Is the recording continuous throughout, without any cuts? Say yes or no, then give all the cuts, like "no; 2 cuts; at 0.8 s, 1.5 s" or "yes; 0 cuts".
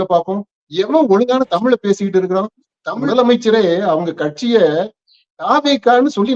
no; 1 cut; at 3.0 s